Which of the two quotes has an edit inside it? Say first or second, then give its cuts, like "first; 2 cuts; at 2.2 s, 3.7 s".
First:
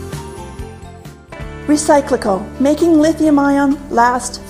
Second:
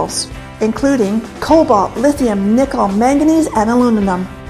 first; 1 cut; at 0.9 s